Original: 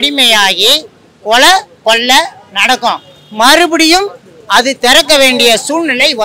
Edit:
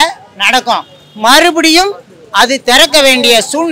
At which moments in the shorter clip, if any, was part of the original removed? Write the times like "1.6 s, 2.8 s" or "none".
none